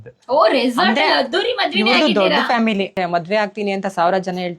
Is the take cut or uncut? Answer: cut